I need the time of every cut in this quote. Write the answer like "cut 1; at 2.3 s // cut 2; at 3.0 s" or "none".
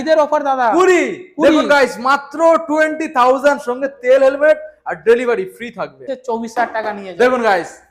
cut 1; at 6.0 s